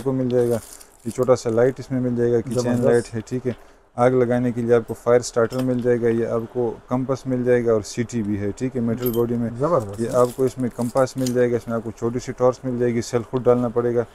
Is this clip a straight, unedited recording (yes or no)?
yes